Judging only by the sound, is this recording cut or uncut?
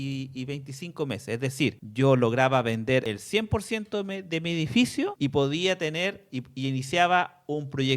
cut